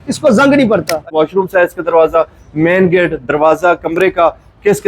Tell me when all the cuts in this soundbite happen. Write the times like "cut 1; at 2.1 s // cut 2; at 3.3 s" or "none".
cut 1; at 1.1 s